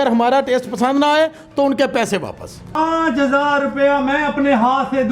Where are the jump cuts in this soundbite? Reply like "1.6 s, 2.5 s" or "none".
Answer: 2.8 s